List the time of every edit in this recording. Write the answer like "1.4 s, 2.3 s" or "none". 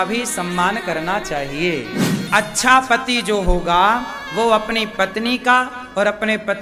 2.2 s